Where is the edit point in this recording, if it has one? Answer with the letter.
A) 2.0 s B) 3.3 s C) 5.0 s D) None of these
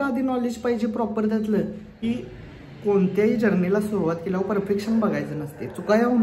A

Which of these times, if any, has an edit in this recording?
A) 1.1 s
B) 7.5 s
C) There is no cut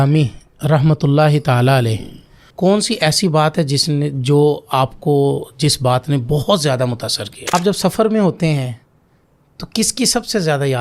B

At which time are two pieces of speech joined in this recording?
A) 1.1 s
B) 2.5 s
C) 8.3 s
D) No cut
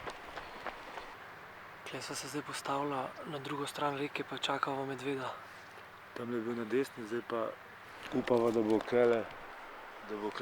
A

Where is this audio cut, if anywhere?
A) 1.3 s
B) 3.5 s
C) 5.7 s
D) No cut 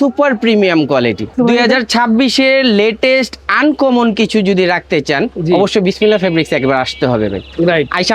A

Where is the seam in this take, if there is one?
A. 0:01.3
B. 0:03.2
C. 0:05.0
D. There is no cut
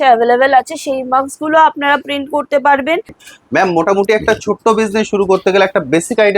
B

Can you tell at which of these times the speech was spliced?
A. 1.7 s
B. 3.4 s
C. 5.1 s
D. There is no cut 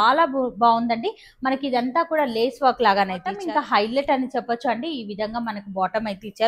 B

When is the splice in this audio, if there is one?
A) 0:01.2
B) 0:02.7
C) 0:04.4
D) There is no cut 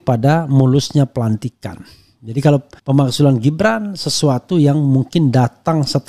B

